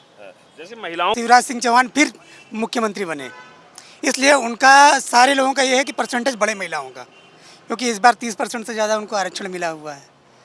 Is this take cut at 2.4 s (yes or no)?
no